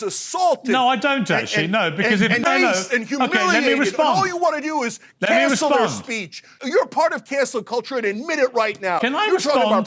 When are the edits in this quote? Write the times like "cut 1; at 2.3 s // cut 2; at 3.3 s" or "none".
cut 1; at 2.4 s // cut 2; at 6.6 s